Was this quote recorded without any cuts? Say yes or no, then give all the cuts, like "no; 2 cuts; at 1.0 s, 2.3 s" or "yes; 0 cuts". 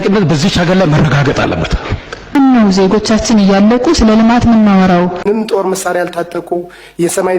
no; 1 cut; at 5.2 s